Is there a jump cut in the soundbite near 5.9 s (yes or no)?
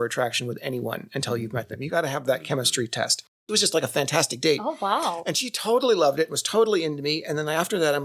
no